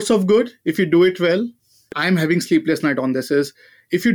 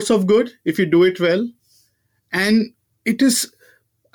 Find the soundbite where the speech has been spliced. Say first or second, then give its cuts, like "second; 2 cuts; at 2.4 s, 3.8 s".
first; 1 cut; at 2.0 s